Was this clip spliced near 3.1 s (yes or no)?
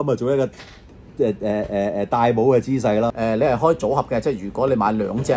yes